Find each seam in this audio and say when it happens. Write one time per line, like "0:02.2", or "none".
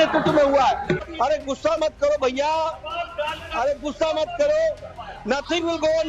0:01.1